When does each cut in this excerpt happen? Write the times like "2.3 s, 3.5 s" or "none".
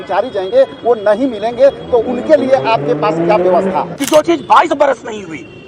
3.9 s